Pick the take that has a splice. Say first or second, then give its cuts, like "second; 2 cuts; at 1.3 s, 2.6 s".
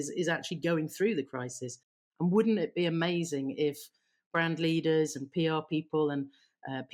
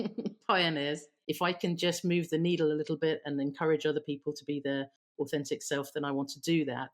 second; 1 cut; at 0.9 s